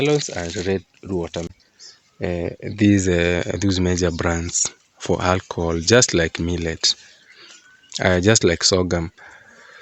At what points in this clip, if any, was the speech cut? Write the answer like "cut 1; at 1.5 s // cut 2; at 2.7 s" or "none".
cut 1; at 1.5 s